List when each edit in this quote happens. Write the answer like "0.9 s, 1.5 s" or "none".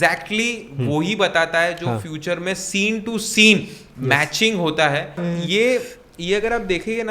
none